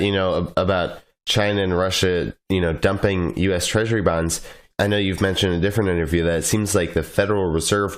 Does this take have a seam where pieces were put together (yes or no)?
yes